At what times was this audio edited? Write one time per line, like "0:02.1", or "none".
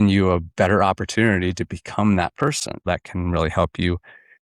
0:02.8